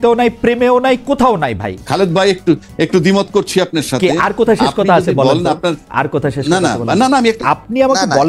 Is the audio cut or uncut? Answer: cut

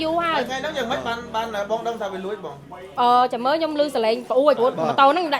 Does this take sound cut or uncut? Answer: cut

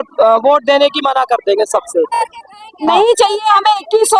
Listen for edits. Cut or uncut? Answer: cut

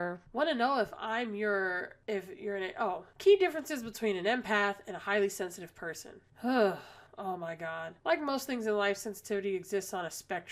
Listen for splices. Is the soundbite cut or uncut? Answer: uncut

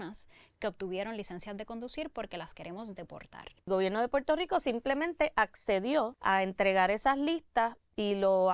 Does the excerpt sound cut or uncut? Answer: cut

